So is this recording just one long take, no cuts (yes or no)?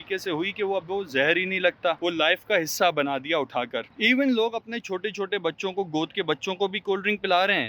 no